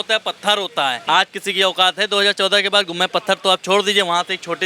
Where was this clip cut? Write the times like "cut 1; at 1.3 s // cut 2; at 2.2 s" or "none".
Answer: cut 1; at 1.0 s